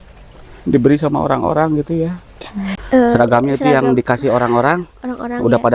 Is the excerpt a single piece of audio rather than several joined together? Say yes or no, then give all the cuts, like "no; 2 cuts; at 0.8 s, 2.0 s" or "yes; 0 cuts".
no; 1 cut; at 2.8 s